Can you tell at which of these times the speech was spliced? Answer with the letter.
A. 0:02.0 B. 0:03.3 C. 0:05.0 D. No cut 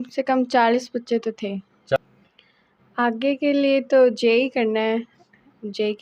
A